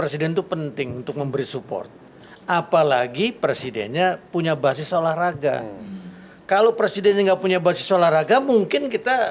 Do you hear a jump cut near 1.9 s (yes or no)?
no